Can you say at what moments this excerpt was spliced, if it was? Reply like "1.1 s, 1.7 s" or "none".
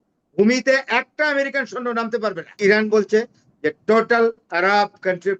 2.6 s